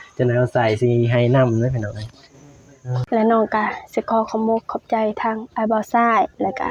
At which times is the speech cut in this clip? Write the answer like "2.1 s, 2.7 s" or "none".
3.0 s